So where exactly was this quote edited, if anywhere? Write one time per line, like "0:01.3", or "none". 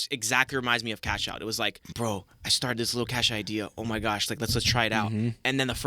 0:01.8